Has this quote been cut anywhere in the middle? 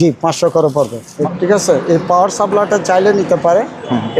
yes; 1 cut; at 1.1 s

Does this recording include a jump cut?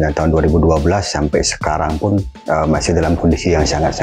no; 0 cuts

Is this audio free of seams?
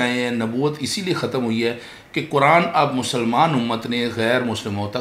yes; 0 cuts

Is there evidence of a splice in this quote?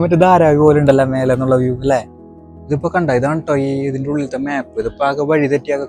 no; 0 cuts

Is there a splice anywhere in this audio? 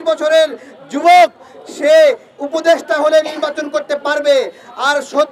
no; 0 cuts

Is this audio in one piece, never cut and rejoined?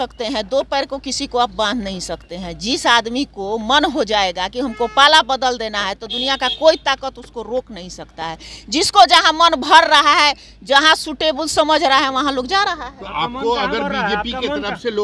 yes; 0 cuts

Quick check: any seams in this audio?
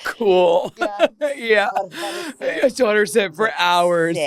no; 0 cuts

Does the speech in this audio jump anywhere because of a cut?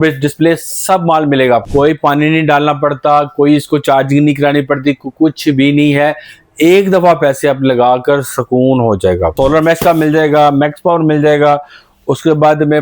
yes; 2 cuts; at 1.7 s, 9.3 s

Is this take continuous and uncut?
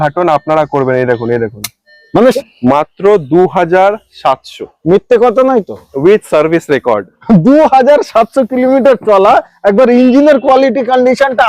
no; 1 cut; at 2.4 s

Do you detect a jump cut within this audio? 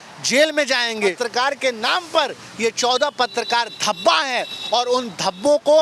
yes; 1 cut; at 0.9 s

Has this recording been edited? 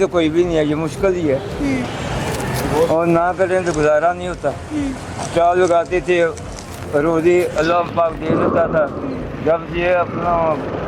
no; 0 cuts

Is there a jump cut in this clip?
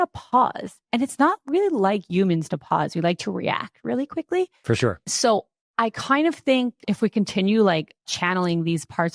yes; 3 cuts; at 5.0 s, 6.8 s, 8.1 s

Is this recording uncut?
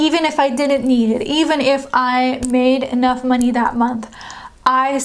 yes; 0 cuts

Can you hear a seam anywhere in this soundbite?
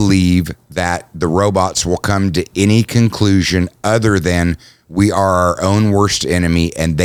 no; 0 cuts

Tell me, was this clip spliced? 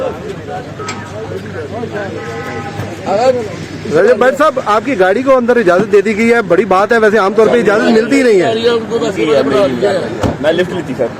yes; 1 cut; at 1.3 s

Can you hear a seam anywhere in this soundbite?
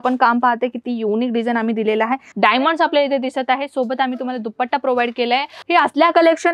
yes; 2 cuts; at 2.2 s, 5.6 s

